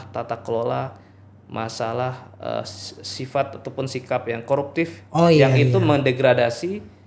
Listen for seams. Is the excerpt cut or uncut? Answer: uncut